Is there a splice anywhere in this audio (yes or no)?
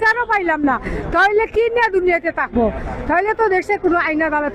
no